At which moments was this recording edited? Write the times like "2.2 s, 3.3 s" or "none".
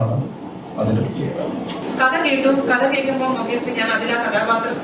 1.8 s